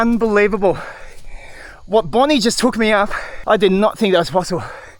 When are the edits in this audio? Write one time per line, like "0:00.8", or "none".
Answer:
0:03.3